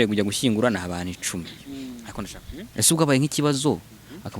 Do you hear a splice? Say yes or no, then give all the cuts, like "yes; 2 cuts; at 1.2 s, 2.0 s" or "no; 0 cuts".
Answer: yes; 1 cut; at 2.0 s